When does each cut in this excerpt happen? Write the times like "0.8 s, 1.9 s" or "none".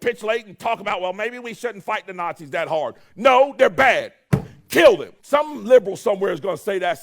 5.1 s